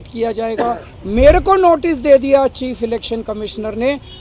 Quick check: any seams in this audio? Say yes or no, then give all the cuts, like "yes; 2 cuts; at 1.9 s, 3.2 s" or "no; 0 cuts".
yes; 1 cut; at 0.9 s